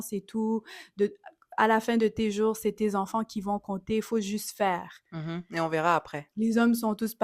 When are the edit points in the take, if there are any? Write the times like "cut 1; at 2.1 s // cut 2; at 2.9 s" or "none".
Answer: none